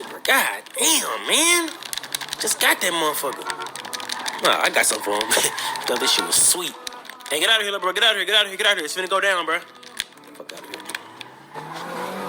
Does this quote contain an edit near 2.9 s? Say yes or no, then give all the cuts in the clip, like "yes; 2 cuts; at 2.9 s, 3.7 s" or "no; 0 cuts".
no; 2 cuts; at 4.2 s, 8.9 s